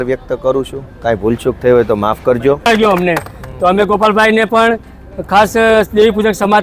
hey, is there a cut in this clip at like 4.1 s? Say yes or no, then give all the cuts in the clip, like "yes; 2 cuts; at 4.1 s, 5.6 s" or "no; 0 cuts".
no; 1 cut; at 2.7 s